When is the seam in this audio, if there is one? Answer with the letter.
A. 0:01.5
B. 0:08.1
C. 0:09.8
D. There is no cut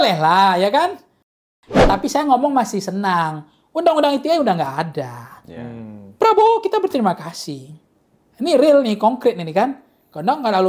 A